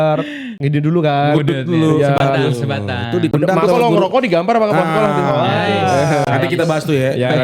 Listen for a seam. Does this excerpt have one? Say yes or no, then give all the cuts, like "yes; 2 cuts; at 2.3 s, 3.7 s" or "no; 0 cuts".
no; 0 cuts